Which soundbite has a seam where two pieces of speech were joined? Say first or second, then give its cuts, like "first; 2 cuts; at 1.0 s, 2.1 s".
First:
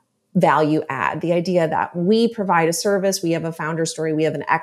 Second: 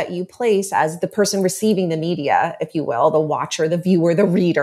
second; 1 cut; at 0.9 s